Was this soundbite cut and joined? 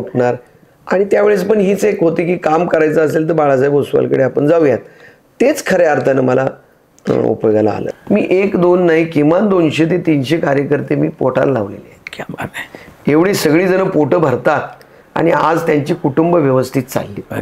yes; 1 cut; at 7.8 s

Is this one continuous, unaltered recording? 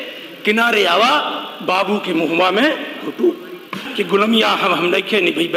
no; 1 cut; at 3.8 s

